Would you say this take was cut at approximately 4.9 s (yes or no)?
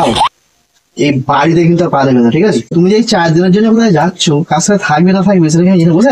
no